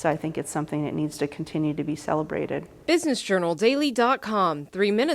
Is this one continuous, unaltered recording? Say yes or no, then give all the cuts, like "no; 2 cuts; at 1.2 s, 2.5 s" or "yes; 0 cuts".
no; 1 cut; at 2.7 s